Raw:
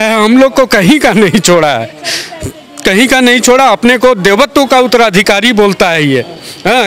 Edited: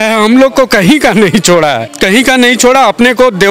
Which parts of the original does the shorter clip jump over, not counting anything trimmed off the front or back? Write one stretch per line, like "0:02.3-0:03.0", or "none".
0:01.9-0:02.7